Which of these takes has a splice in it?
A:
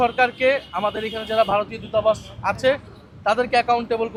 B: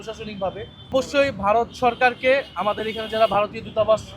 B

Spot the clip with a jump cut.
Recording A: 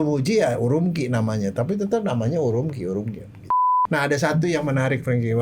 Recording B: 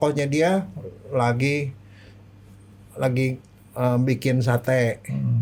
A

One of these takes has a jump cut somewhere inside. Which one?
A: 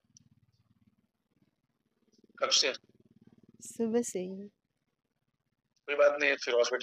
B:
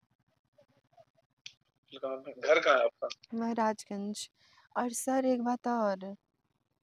B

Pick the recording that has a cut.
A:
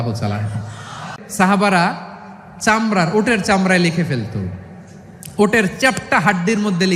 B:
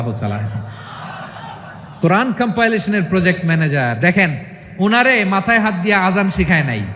B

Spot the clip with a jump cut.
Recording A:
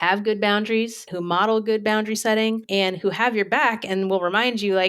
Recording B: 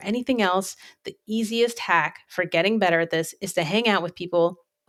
A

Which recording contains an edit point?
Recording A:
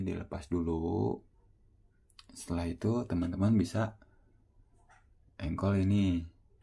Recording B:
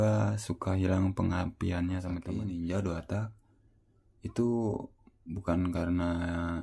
B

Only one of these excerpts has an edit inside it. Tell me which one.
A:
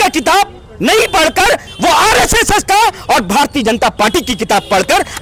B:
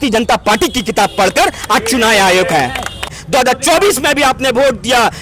B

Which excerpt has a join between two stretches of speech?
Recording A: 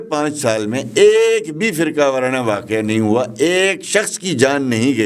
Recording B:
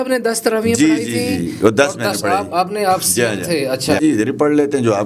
B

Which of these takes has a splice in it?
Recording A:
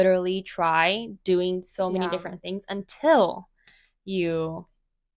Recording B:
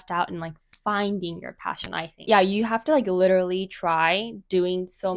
B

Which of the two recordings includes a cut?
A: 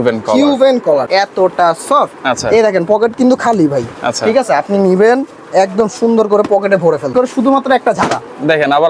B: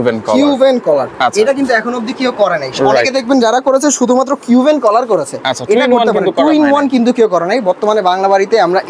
A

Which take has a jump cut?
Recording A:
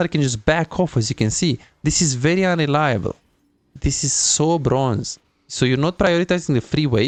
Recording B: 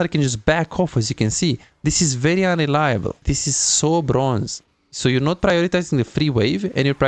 B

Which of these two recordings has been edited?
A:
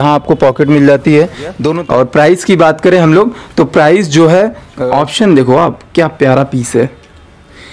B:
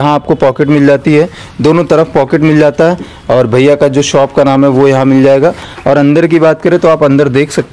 A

